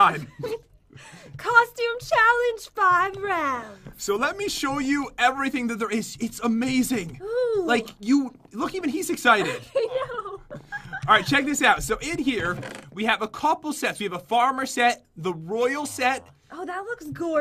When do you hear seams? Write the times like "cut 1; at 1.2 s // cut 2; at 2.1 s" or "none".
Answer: none